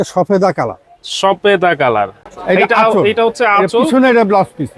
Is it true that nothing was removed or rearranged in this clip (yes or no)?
no